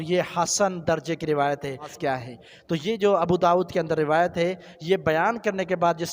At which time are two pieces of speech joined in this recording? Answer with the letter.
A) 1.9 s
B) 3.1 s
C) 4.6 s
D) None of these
A